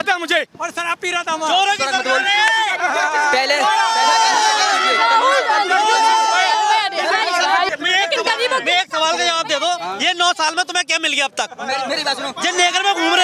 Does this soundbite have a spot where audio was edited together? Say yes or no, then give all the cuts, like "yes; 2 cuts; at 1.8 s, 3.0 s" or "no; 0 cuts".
yes; 1 cut; at 7.7 s